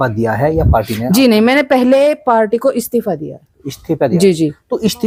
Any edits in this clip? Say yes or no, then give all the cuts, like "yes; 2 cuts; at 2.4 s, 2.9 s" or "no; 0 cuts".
no; 0 cuts